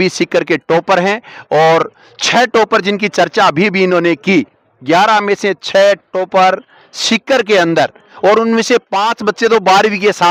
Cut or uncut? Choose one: uncut